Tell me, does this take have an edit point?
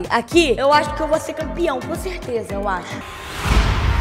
yes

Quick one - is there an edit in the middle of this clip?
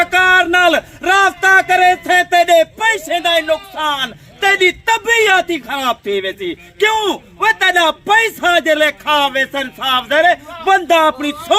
no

